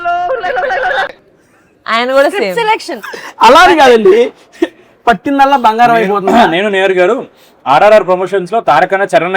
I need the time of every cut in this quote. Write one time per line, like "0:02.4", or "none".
none